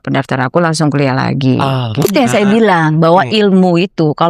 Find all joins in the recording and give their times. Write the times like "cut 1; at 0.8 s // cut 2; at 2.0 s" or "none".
cut 1; at 2.1 s